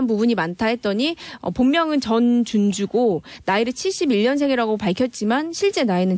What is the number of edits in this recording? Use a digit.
1